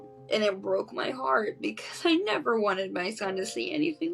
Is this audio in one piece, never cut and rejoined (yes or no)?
yes